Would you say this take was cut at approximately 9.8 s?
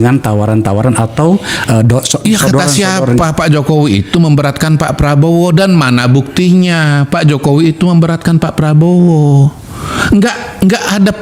no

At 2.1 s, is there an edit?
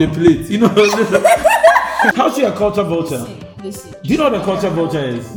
yes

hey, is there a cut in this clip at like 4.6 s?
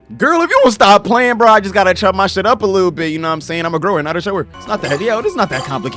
yes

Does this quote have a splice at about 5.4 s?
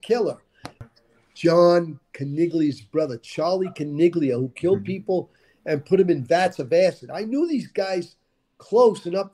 no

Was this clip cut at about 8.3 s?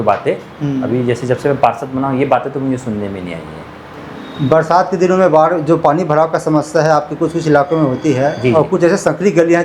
no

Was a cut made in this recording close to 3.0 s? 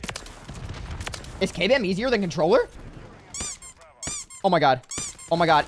yes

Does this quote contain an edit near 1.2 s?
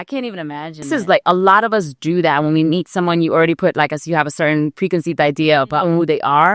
yes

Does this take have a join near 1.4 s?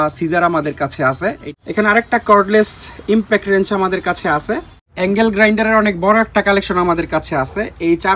yes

